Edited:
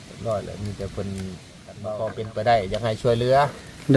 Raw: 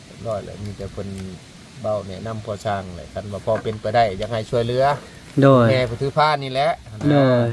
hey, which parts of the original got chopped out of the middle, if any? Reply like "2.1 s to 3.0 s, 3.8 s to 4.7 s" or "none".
1.7 s to 3.2 s